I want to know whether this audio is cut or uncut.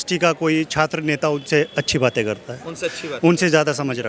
uncut